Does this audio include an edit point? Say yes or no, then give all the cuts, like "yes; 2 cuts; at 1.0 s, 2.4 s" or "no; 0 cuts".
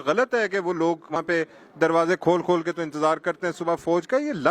yes; 1 cut; at 1.2 s